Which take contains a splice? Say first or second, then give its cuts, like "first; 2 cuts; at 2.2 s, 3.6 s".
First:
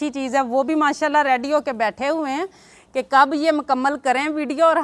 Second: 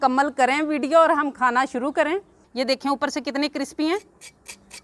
second; 1 cut; at 2.4 s